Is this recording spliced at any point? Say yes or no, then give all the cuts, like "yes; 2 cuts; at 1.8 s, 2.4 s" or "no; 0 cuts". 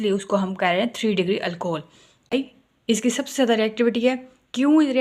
yes; 1 cut; at 2.3 s